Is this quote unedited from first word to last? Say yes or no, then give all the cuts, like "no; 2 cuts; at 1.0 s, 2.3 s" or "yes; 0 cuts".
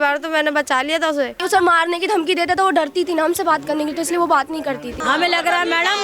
no; 2 cuts; at 1.4 s, 5.0 s